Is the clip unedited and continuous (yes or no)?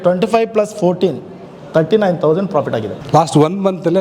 no